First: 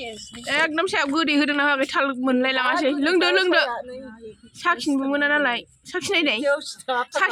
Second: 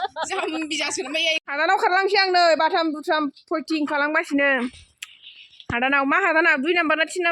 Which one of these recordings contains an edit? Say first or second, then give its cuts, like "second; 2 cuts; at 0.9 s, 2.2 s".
second; 1 cut; at 1.5 s